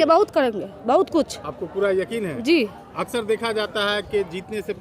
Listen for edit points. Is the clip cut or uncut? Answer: uncut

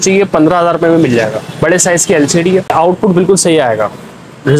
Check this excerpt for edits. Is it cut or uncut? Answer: cut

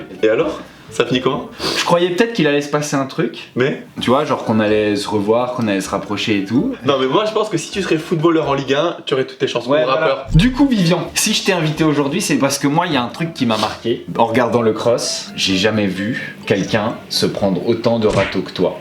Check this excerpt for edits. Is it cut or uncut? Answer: uncut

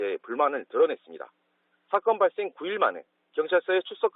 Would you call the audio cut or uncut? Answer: cut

